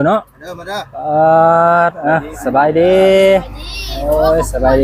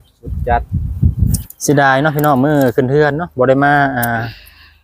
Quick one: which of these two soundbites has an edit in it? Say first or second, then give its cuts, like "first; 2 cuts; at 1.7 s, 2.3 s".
second; 1 cut; at 1.4 s